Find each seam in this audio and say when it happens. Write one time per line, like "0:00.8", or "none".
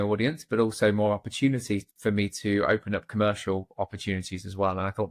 none